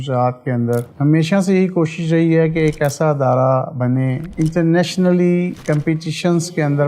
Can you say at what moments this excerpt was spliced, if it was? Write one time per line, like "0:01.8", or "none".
0:00.9
0:04.3